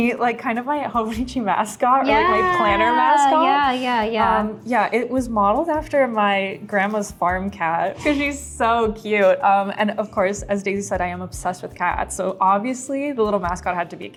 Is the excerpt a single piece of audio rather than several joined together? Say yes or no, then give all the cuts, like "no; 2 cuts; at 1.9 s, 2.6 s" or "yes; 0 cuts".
yes; 0 cuts